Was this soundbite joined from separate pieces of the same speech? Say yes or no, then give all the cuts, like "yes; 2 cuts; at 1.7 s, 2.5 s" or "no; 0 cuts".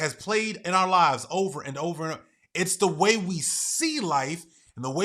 no; 0 cuts